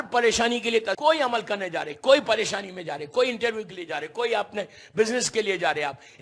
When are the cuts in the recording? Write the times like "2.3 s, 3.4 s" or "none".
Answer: 1.0 s